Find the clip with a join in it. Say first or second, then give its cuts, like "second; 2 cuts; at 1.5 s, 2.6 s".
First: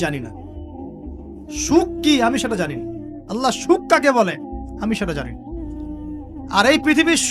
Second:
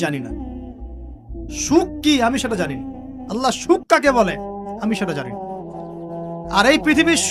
first; 2 cuts; at 5.2 s, 6.5 s